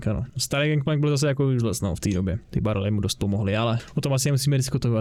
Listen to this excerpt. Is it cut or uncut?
uncut